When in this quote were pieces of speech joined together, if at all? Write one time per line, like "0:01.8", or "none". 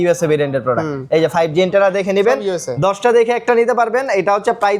none